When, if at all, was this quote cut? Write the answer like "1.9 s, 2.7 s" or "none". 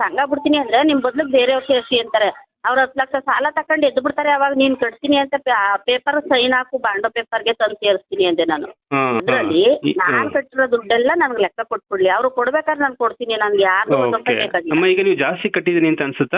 9.2 s